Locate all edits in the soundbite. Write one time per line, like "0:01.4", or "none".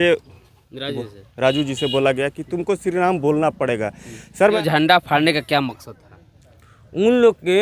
0:04.6

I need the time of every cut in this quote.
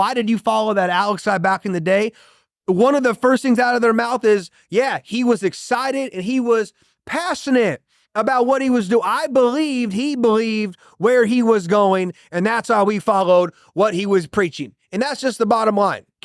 none

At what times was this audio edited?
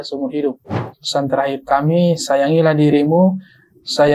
0:00.9

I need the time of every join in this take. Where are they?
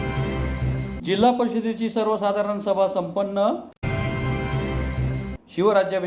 0:00.9

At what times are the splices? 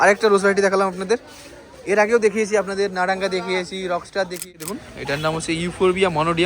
0:04.7

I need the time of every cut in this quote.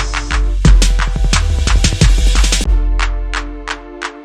0:02.7

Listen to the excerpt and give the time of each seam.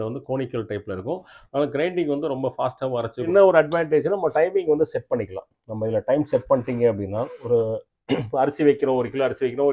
0:03.3

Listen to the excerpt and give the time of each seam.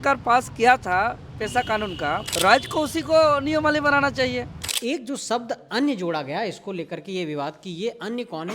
0:02.3
0:04.7

